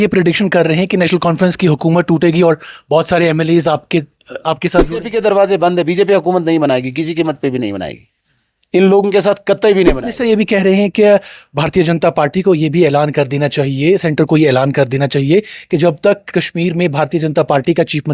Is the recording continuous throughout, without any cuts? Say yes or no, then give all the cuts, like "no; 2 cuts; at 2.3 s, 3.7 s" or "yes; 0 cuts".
no; 2 cuts; at 5.1 s, 10.2 s